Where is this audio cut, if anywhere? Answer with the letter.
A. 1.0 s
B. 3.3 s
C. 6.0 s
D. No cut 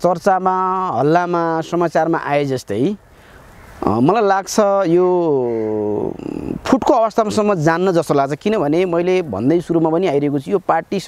D